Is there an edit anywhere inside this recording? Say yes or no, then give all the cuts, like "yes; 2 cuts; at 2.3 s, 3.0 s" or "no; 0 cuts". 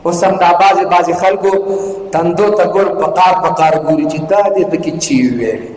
no; 0 cuts